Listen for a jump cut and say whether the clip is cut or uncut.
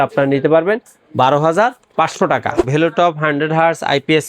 cut